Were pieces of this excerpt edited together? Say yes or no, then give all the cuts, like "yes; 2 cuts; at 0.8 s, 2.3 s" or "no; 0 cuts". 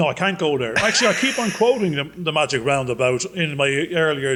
no; 0 cuts